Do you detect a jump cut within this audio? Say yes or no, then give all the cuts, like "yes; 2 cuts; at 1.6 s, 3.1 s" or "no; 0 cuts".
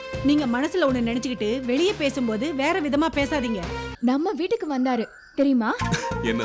yes; 1 cut; at 3.9 s